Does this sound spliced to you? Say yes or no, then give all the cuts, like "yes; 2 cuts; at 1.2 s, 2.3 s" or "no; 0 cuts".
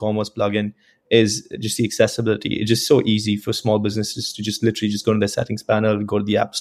no; 0 cuts